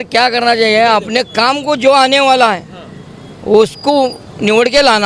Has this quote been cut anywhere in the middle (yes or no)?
no